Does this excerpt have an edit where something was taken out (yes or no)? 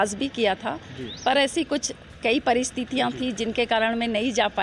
no